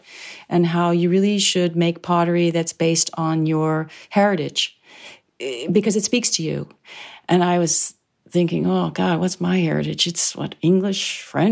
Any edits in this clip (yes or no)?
no